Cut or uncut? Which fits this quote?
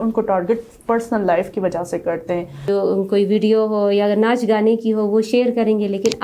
cut